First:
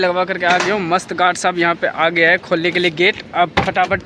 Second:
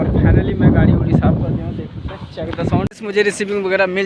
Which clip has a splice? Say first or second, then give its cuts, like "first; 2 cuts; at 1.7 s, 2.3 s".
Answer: second; 1 cut; at 3.0 s